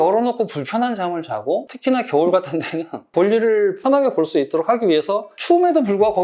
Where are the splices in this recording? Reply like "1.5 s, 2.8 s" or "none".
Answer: 1.6 s